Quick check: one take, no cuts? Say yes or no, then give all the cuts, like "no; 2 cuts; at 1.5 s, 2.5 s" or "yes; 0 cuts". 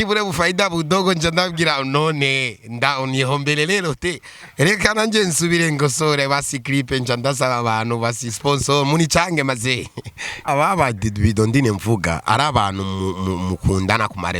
no; 1 cut; at 10.5 s